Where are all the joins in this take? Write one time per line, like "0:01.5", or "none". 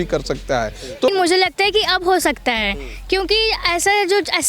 0:01.1